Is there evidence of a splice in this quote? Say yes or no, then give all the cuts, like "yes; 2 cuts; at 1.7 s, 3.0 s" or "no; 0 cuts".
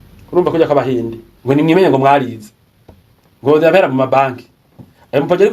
yes; 1 cut; at 1.3 s